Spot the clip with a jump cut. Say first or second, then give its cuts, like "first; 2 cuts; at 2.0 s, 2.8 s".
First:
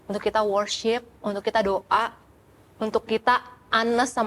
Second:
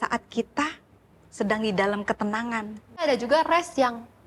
second; 1 cut; at 3.0 s